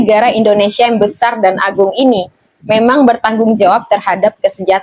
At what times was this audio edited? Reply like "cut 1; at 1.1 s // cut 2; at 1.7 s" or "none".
none